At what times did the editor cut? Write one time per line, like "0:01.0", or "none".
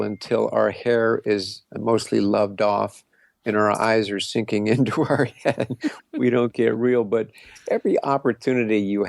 none